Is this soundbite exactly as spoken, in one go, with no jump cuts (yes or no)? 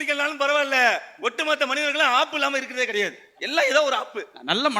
yes